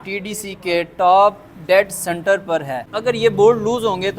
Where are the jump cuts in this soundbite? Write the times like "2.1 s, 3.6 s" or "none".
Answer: 2.8 s